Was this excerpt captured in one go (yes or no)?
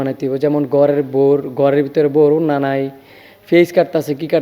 yes